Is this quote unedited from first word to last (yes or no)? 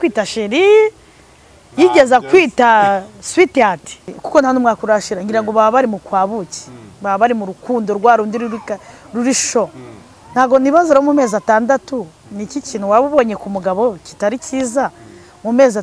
no